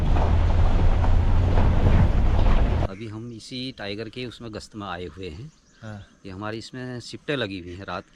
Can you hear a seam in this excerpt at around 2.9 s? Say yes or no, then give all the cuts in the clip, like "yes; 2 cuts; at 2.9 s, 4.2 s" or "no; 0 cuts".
yes; 1 cut; at 2.9 s